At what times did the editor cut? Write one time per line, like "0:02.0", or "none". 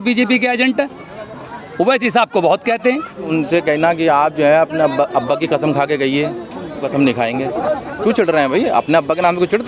0:03.3
0:06.8
0:07.9